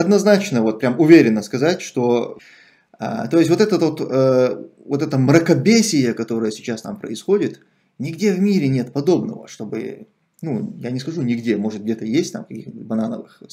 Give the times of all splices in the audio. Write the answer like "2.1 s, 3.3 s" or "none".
2.4 s